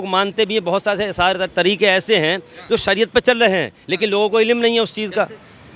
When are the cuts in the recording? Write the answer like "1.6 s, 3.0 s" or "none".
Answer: none